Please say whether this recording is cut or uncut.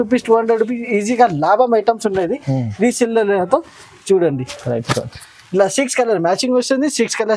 uncut